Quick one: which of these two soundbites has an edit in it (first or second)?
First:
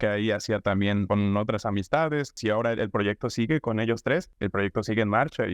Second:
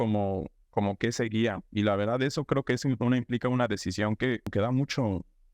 first